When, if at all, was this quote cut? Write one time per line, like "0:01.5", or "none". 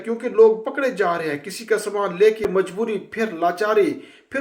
0:02.5